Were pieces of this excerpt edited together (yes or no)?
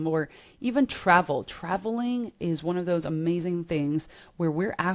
no